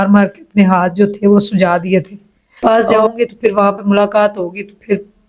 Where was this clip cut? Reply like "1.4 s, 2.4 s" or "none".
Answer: 2.6 s